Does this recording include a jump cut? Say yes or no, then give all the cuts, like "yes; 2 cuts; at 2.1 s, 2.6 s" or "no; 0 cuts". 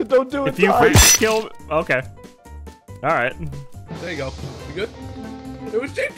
no; 0 cuts